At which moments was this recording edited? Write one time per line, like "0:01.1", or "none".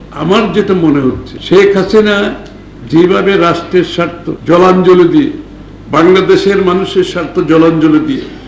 0:01.3
0:04.3